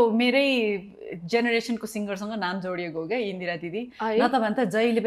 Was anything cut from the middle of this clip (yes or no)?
no